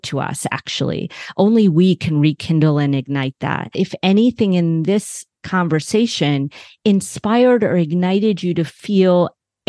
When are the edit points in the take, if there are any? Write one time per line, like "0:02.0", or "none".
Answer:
0:03.7